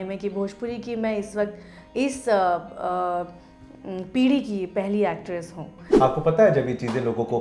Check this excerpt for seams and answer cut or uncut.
cut